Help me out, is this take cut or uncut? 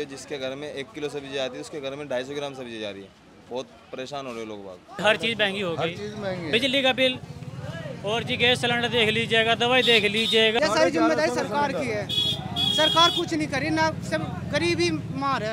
cut